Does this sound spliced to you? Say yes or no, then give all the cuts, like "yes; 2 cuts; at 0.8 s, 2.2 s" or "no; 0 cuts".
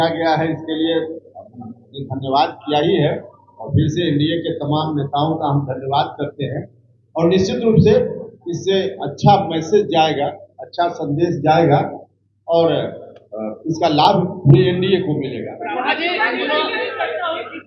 no; 0 cuts